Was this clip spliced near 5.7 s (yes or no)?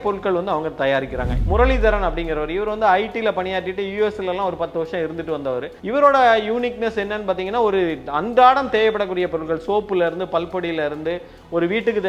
yes